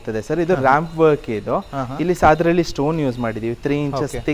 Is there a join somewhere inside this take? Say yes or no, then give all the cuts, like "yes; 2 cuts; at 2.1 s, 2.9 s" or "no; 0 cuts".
no; 0 cuts